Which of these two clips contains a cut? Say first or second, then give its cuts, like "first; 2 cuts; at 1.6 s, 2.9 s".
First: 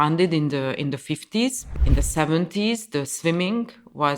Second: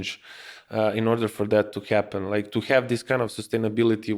first; 1 cut; at 1.7 s